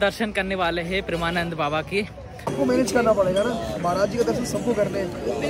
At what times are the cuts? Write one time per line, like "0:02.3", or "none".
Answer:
0:02.4